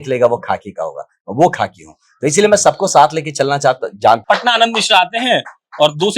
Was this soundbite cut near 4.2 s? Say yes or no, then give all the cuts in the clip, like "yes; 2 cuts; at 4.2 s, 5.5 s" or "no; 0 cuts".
yes; 1 cut; at 4.2 s